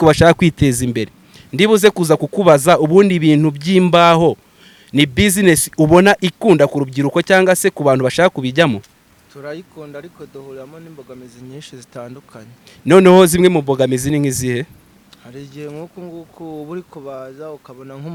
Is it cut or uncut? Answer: uncut